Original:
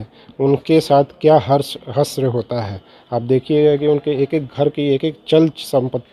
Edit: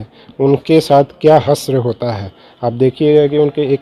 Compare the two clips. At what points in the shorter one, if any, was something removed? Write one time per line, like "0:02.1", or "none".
0:01.4